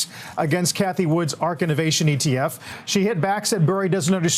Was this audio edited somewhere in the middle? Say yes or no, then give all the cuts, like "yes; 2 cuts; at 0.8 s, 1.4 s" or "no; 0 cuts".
yes; 1 cut; at 2.7 s